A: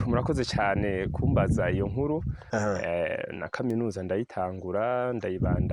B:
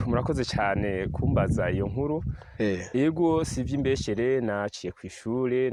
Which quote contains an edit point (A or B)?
A